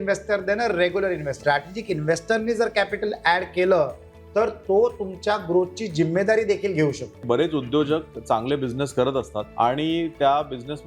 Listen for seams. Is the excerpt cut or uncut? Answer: cut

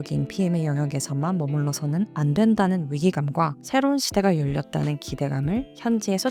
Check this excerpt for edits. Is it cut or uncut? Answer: uncut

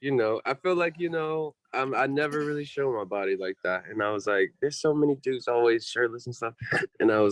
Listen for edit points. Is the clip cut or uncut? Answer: uncut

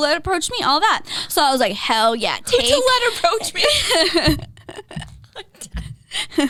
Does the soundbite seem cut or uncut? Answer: uncut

